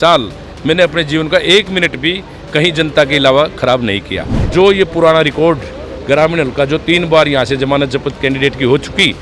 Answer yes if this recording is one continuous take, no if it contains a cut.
no